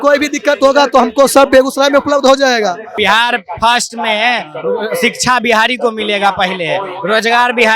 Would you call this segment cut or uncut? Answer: cut